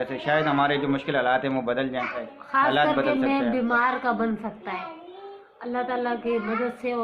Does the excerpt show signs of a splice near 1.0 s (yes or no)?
no